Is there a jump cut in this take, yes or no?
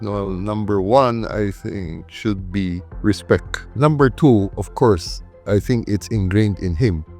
yes